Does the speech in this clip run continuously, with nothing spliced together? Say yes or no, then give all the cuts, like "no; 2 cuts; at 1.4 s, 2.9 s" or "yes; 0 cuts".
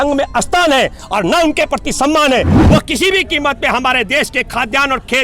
no; 1 cut; at 2.6 s